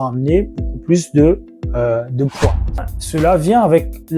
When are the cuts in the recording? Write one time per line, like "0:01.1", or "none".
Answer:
0:03.0